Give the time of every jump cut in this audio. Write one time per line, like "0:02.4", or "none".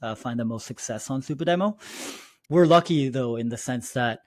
0:02.3